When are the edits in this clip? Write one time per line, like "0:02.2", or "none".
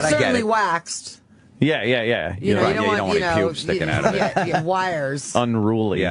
none